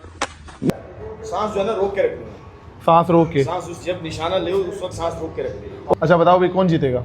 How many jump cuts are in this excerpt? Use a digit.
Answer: 2